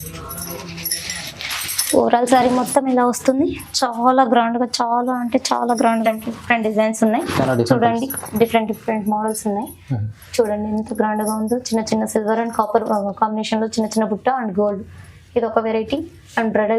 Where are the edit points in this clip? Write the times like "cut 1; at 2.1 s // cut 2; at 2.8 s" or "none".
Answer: cut 1; at 6.0 s